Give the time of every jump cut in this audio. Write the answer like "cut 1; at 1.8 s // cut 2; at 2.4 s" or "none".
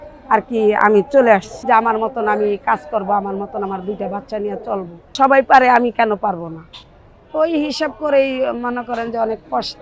cut 1; at 1.5 s // cut 2; at 5.1 s